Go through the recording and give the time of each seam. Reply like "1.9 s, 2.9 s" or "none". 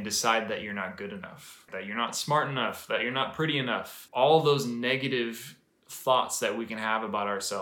1.7 s, 4.0 s